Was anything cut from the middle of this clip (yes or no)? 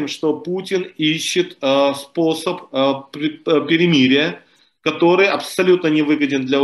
no